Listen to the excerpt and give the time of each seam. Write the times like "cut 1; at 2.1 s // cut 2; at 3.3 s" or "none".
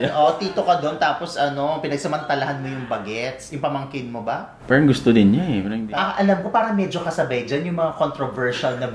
cut 1; at 5.7 s